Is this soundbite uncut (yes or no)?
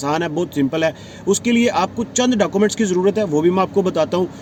yes